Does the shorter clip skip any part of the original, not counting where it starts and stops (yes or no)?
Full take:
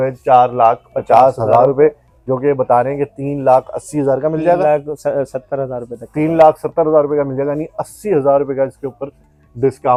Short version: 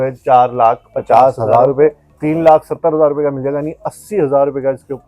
yes